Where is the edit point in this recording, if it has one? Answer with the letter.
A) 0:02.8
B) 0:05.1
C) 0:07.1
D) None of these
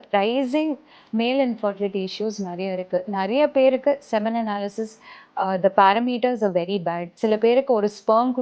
C